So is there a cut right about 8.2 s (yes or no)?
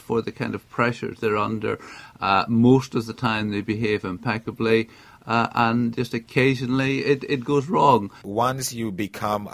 yes